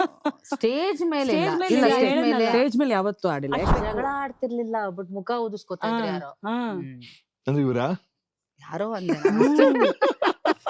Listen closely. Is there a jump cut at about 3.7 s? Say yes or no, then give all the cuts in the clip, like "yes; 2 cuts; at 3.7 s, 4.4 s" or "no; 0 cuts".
yes; 1 cut; at 3.7 s